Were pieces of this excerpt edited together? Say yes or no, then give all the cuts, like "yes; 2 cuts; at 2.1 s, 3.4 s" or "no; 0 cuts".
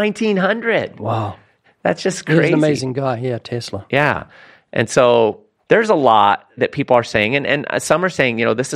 yes; 3 cuts; at 1.5 s, 5.5 s, 6.6 s